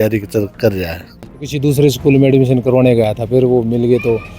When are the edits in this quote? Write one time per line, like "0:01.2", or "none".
0:01.3